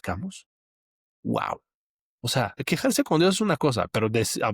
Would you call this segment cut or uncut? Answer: cut